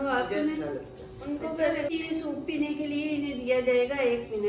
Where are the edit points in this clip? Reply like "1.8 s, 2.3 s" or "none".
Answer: 1.9 s